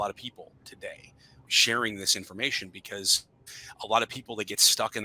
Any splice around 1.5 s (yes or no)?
yes